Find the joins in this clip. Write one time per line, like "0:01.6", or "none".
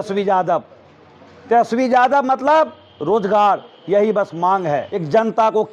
0:04.7